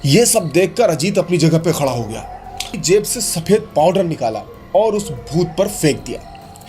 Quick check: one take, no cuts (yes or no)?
no